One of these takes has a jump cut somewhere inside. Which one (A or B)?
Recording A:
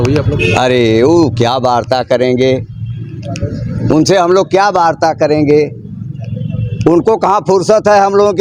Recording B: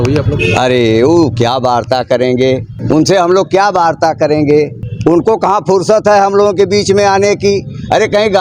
B